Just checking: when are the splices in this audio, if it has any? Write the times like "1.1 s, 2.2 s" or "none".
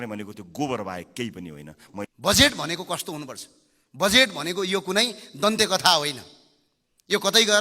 2.1 s